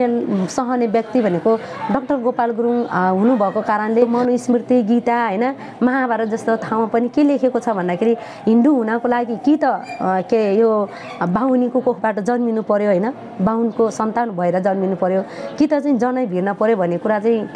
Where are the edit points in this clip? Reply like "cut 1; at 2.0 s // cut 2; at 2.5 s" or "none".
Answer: cut 1; at 4.1 s